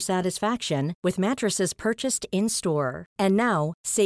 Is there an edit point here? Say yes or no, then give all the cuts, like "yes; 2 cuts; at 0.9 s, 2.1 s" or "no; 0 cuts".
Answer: no; 0 cuts